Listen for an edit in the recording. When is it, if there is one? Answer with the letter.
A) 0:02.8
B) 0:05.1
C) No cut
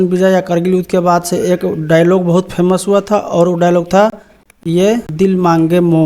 B